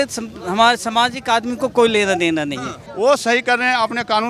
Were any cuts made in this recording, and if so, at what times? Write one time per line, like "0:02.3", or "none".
0:02.8